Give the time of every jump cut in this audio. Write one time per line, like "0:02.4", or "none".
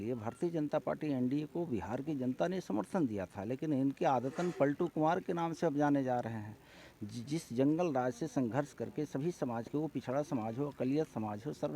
none